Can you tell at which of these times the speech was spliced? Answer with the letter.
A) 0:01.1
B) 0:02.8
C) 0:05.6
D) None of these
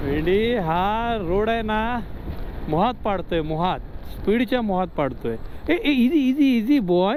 D